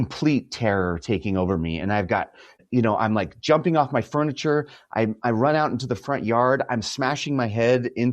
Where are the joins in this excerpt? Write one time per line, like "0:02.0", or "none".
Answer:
0:02.6